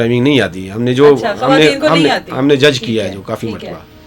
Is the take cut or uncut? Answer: uncut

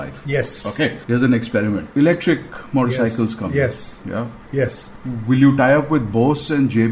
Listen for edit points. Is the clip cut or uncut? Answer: cut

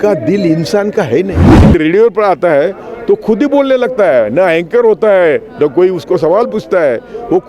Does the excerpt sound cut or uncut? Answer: cut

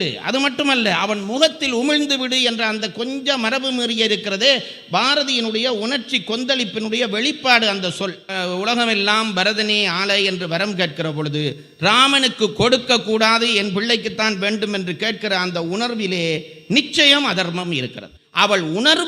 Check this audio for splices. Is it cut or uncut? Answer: cut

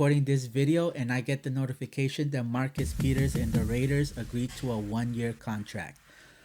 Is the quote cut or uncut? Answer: uncut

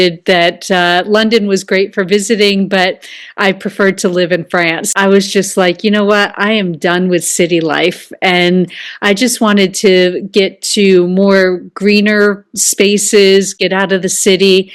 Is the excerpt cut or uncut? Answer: cut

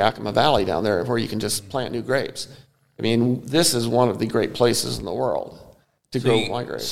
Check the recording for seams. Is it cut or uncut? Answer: uncut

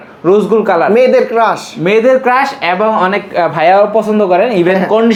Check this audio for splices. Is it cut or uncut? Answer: uncut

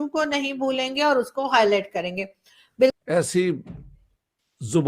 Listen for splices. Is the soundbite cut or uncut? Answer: cut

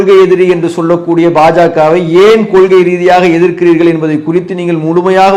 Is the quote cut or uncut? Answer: uncut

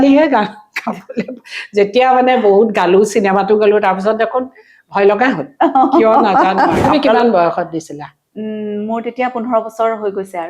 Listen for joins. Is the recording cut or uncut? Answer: cut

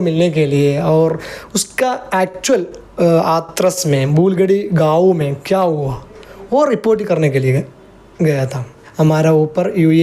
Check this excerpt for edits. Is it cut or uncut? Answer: cut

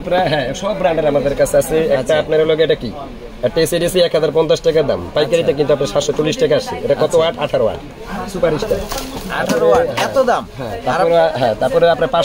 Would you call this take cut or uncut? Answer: uncut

